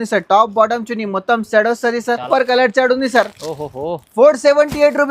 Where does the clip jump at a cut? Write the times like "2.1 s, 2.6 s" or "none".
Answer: 2.2 s